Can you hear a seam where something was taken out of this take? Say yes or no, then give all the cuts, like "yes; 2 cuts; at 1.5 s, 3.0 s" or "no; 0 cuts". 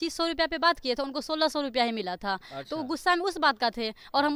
no; 0 cuts